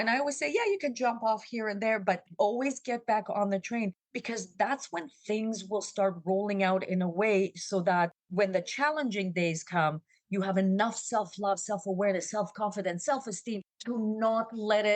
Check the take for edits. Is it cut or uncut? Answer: cut